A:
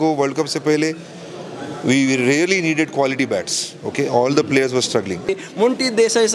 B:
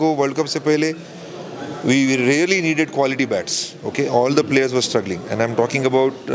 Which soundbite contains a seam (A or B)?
A